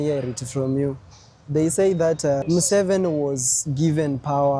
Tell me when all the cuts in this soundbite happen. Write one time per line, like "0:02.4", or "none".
0:02.4

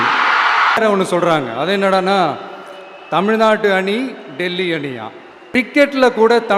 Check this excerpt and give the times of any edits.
0:00.8
0:05.7

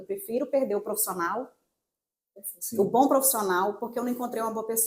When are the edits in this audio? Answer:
none

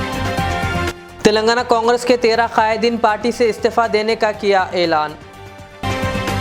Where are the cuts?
0:00.9

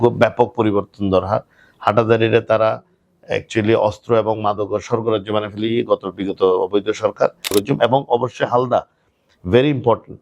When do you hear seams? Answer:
0:07.5

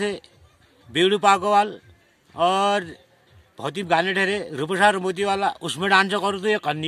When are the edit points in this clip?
none

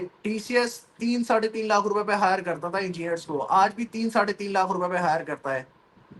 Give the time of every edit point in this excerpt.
none

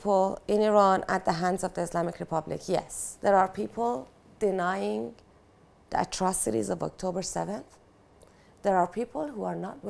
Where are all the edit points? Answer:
0:03.0

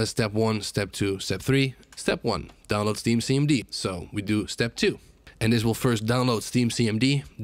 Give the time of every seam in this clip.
0:01.8
0:03.7

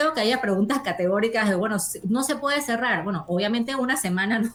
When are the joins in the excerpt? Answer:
none

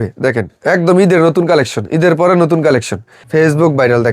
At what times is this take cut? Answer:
0:03.1

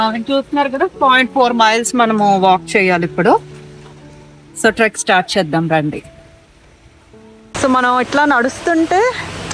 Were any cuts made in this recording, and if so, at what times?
none

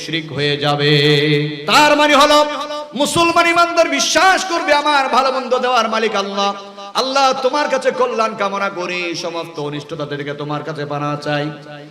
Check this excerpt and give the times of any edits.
0:01.6

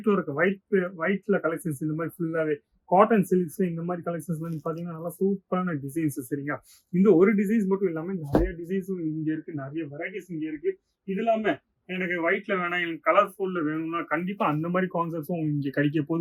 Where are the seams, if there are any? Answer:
none

